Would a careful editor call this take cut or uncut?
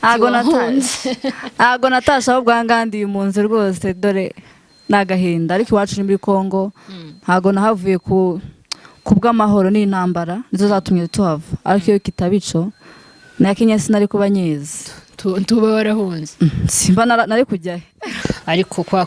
cut